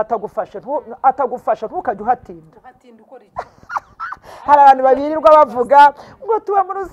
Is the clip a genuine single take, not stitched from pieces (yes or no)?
yes